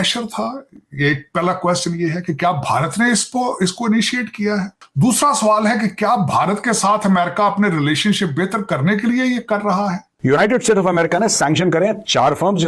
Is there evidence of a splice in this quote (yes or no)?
yes